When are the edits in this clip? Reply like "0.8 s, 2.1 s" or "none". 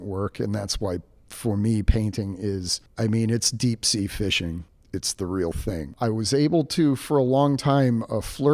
5.9 s